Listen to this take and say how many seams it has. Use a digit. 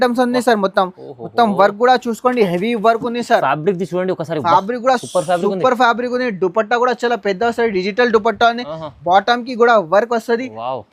0